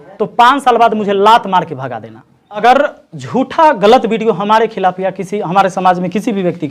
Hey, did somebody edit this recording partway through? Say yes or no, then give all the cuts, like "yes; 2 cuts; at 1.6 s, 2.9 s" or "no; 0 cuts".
yes; 1 cut; at 2.6 s